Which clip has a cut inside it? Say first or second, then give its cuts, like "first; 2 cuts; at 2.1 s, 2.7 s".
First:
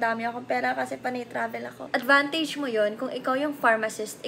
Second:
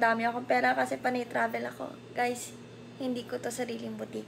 first; 1 cut; at 1.9 s